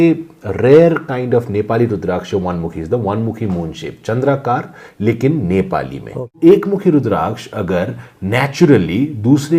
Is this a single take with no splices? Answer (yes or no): no